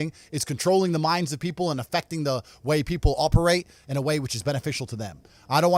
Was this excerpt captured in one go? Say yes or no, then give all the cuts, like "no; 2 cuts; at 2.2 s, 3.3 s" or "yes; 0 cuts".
yes; 0 cuts